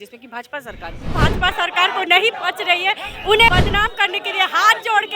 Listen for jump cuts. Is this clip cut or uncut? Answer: cut